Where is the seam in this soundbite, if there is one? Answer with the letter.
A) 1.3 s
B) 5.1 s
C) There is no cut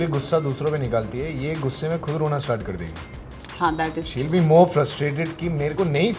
C